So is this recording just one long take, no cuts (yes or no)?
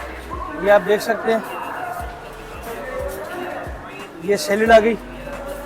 yes